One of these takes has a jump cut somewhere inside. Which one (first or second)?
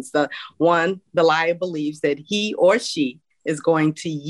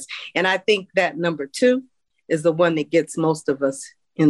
first